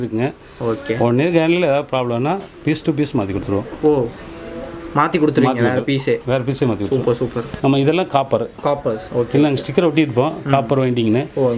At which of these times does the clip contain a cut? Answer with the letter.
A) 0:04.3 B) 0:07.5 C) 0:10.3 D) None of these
B